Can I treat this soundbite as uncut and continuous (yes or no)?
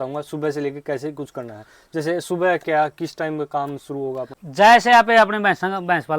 no